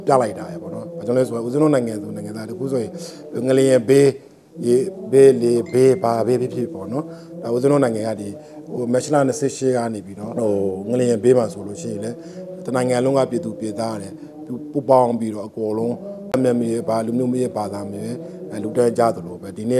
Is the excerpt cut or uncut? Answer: uncut